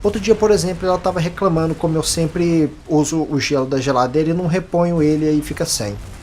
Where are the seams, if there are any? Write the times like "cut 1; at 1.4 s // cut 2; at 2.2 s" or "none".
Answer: cut 1; at 5.2 s